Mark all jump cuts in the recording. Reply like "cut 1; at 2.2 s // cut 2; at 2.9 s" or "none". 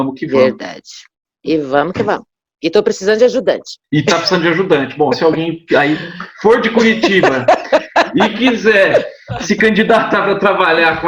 cut 1; at 3.7 s